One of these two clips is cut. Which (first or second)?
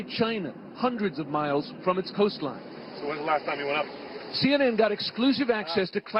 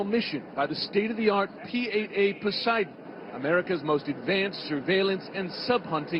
first